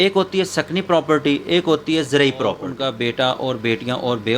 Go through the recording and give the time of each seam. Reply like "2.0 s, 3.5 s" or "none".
2.7 s